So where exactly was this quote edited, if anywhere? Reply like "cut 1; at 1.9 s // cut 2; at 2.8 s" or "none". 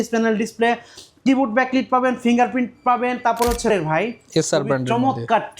cut 1; at 3.7 s